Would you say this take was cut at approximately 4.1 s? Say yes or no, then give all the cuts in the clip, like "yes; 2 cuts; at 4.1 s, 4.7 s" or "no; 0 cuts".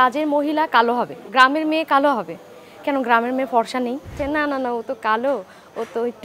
yes; 2 cuts; at 1.2 s, 4.1 s